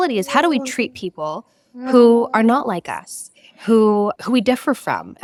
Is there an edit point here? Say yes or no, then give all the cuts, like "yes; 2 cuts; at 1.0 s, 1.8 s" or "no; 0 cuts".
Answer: no; 0 cuts